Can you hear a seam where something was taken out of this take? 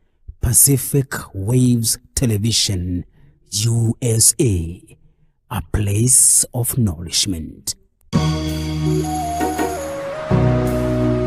no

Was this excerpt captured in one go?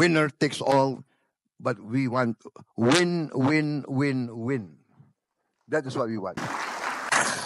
no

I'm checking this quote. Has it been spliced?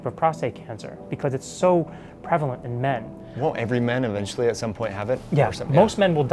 no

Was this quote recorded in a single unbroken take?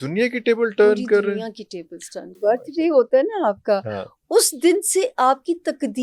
no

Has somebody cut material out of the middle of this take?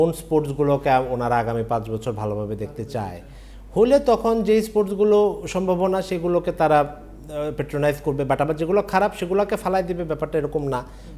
no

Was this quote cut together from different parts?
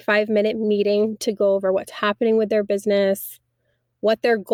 no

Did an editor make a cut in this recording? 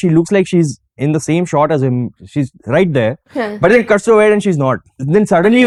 no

